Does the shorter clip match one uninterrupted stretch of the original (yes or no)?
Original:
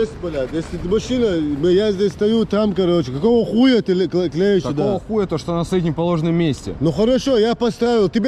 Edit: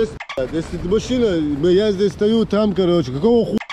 yes